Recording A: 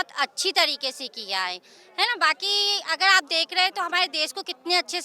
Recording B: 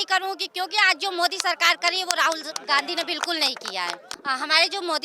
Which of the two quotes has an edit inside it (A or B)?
B